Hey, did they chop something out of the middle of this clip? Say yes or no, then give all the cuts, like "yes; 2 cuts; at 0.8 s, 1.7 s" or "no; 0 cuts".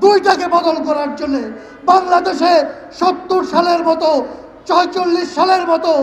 no; 0 cuts